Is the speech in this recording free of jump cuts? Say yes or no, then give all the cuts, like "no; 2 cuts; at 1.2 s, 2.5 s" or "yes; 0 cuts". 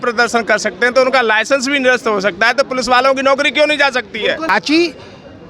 no; 1 cut; at 4.5 s